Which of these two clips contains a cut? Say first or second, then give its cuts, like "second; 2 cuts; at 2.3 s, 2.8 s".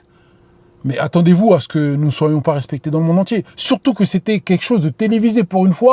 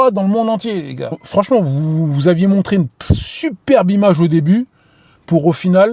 second; 1 cut; at 1.2 s